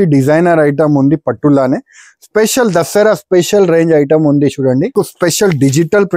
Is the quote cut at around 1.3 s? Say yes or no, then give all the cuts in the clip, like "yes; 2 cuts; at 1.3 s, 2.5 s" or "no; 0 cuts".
no; 1 cut; at 4.9 s